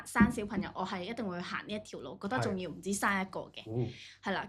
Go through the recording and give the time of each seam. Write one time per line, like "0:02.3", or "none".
none